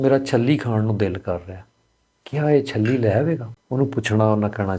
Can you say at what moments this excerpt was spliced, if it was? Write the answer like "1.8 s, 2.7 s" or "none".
3.6 s